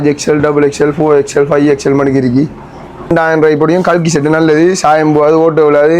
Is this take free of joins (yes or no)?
no